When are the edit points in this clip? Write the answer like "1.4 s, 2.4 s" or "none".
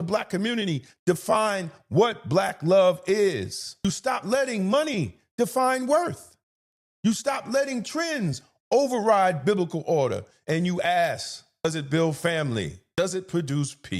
3.8 s, 11.6 s, 12.8 s